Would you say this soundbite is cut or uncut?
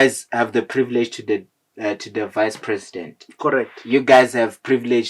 uncut